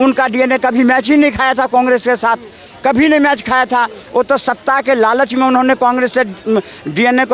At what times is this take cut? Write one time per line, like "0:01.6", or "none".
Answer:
none